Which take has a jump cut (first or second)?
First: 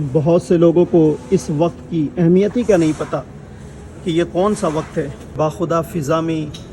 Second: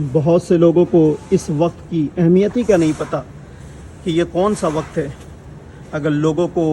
first